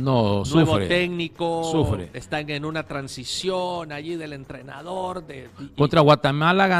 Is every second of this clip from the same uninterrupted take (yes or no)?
yes